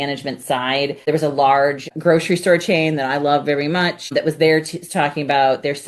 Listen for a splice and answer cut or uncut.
cut